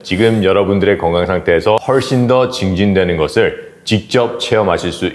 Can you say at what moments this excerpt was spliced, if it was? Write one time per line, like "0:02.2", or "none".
0:01.8